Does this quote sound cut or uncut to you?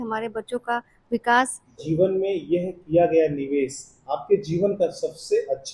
cut